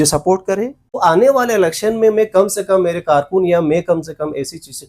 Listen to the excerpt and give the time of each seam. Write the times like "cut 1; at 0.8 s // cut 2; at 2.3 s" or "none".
cut 1; at 1.0 s